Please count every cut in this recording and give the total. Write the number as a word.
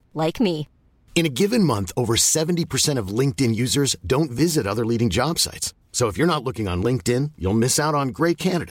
zero